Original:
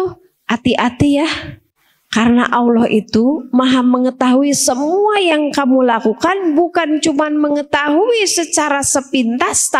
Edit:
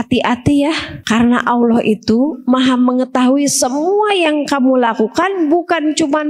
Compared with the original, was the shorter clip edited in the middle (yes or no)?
yes